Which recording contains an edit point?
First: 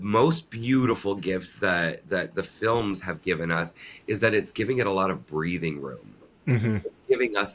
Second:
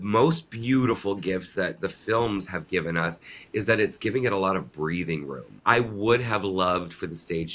second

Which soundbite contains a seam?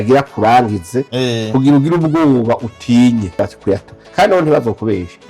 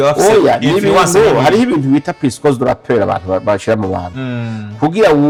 first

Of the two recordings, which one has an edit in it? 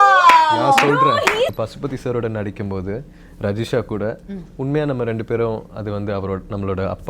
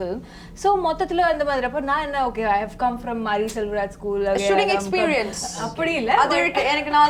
first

